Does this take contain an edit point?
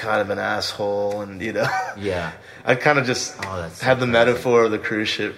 yes; 1 cut; at 2.4 s

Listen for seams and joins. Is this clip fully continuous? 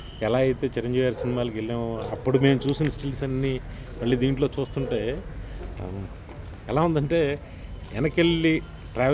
yes; 0 cuts

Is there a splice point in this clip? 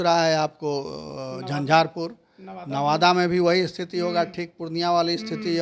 no; 0 cuts

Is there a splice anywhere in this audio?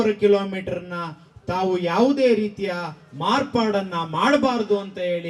no; 0 cuts

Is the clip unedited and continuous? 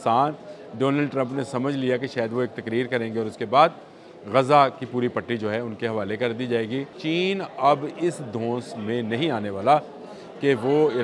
no; 1 cut; at 7.0 s

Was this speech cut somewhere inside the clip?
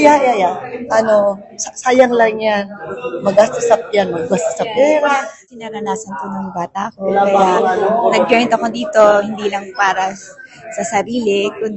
yes; 1 cut; at 5.4 s

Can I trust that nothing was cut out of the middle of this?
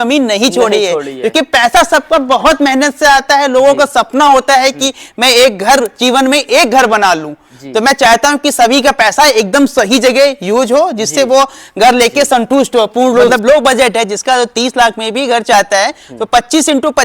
no; 1 cut; at 13.3 s

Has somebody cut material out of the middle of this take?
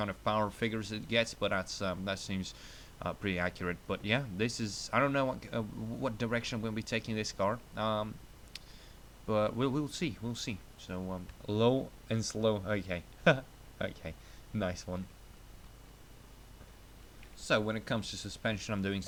no; 0 cuts

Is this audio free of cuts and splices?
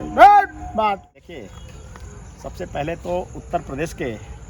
no; 1 cut; at 1.0 s

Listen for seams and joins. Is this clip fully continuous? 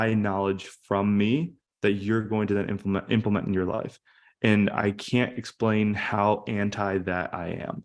yes; 0 cuts

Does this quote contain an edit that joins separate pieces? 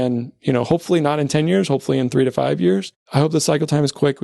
yes; 1 cut; at 2.9 s

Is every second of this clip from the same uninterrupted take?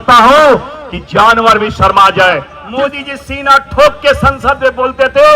no; 1 cut; at 2.5 s

